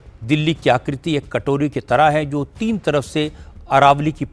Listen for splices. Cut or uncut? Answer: uncut